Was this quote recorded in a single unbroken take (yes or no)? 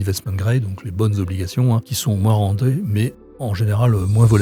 yes